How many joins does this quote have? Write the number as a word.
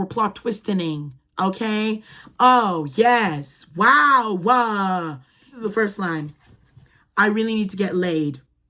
one